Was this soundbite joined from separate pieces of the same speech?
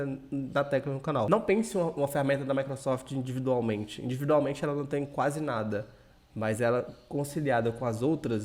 yes; 1 cut; at 1.3 s

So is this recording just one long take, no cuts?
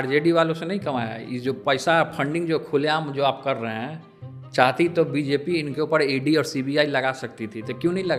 yes; 0 cuts

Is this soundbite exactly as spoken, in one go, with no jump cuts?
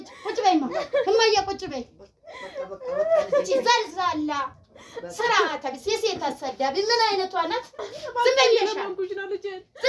yes; 0 cuts

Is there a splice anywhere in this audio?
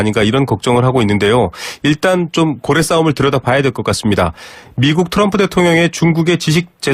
yes; 1 cut; at 5.0 s

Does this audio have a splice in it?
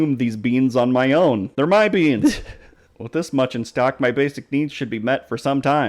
yes; 1 cut; at 1.6 s

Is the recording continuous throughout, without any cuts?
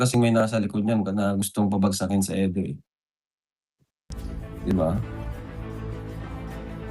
no; 1 cut; at 5.0 s

